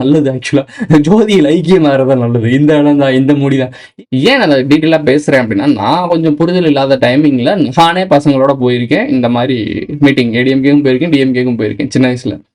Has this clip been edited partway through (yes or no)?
yes